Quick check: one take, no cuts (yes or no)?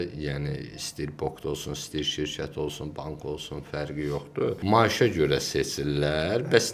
no